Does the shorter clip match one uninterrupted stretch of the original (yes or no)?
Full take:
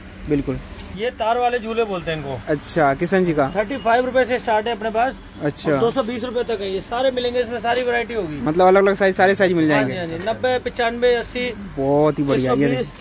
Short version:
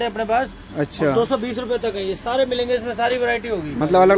yes